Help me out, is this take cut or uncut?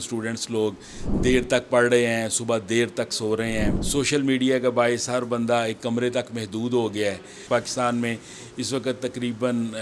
cut